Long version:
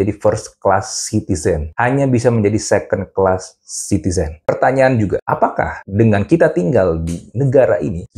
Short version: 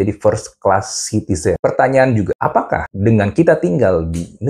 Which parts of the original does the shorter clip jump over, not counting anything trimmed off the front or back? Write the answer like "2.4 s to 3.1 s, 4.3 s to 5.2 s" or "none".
1.6 s to 4.4 s, 5.5 s to 5.6 s